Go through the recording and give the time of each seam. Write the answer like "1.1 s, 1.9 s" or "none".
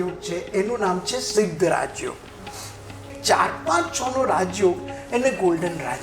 3.2 s